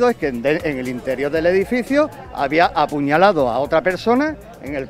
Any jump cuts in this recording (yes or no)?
no